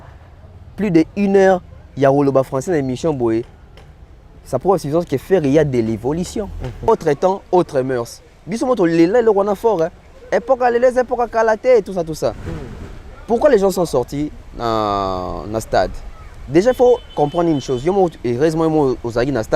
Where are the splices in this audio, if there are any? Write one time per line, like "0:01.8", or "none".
0:06.9